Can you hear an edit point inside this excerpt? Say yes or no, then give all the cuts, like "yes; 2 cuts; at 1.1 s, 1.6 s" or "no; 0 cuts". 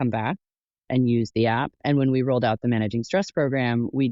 yes; 1 cut; at 1.8 s